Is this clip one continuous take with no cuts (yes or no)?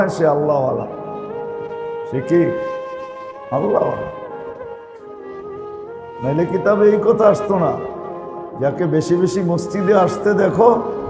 yes